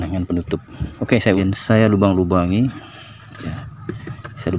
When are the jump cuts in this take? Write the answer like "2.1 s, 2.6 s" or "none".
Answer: 1.4 s